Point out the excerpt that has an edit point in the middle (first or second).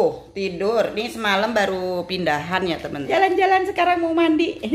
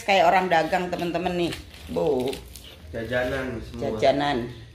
first